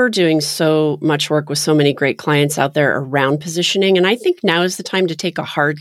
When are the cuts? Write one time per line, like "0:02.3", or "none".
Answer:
none